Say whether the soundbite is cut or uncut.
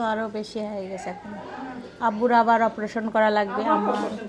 uncut